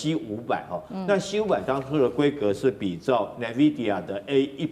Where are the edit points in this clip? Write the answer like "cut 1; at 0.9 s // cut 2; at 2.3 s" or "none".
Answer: none